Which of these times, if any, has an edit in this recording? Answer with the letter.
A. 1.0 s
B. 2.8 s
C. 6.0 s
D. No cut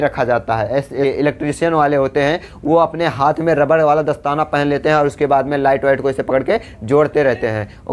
A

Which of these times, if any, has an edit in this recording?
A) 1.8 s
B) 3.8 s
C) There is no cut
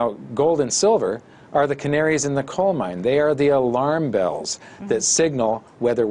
A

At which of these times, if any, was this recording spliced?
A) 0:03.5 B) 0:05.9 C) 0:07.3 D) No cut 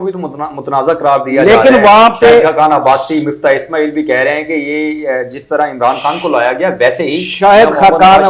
D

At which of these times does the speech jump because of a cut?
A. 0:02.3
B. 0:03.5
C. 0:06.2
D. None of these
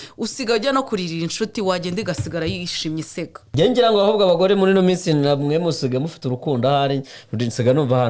B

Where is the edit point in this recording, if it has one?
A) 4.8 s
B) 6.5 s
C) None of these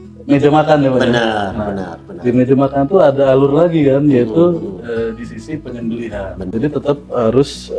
B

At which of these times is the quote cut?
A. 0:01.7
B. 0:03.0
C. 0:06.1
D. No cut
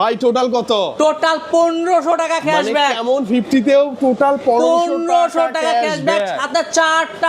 D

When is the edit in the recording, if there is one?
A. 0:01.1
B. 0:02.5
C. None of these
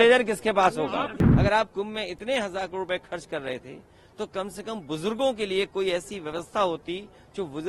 A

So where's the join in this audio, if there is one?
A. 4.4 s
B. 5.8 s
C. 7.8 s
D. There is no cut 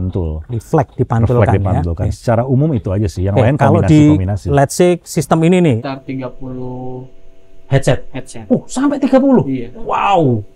B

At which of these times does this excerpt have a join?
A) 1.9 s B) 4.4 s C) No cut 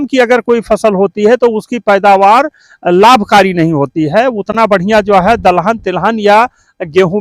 C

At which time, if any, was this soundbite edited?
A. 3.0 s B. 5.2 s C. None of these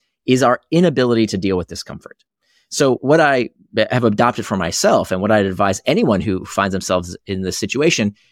A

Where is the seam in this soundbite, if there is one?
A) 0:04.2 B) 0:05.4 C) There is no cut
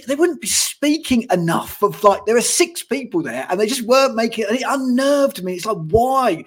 C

